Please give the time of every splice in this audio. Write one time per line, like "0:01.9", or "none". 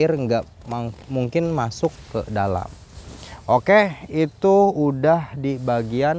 none

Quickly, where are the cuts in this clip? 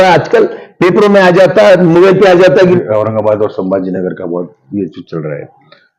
0:02.8

